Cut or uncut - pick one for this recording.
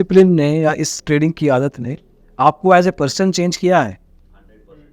uncut